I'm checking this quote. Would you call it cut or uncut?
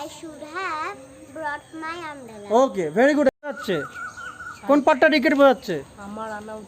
cut